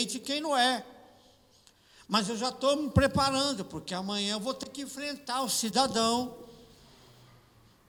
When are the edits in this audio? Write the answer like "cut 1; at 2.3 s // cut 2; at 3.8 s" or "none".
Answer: none